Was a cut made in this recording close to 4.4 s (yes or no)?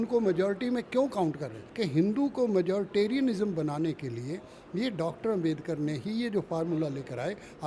no